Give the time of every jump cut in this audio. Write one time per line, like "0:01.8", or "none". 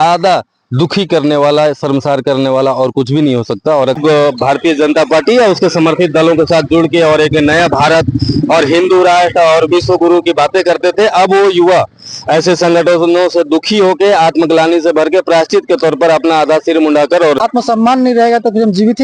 0:04.0
0:17.4